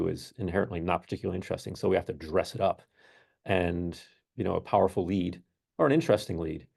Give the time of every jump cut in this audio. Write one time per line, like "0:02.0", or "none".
none